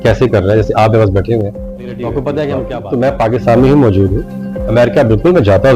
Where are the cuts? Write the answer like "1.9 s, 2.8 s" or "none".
2.7 s